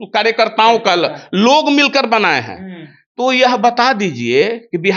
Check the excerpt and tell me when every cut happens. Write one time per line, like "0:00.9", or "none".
none

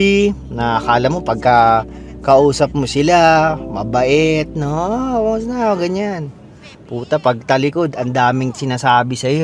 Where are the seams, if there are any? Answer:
none

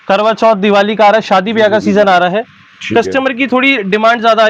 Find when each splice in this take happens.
none

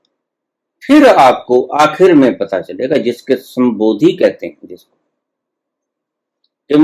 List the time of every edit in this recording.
none

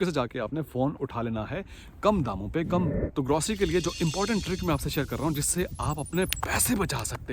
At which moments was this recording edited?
0:03.0

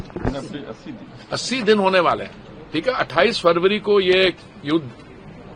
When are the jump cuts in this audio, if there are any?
none

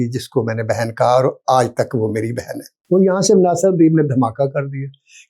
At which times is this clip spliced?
0:02.7

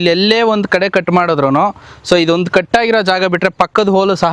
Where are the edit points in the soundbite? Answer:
none

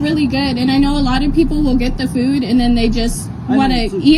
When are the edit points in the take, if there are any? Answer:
none

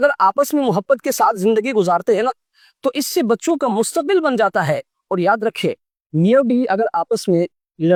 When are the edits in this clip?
none

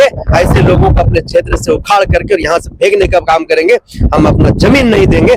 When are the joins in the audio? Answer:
none

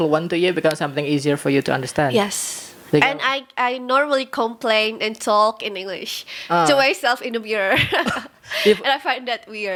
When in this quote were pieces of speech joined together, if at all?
none

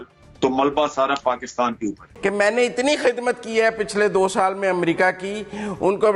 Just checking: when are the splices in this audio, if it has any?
0:02.1

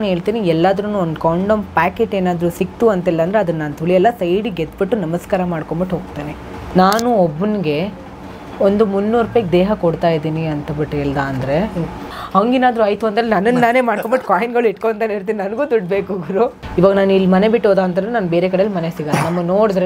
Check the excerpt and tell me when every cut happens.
0:06.6
0:12.1
0:16.6

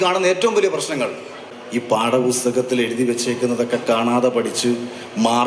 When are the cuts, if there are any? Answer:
0:01.5

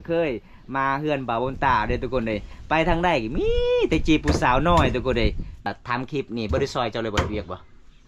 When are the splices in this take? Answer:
0:05.7

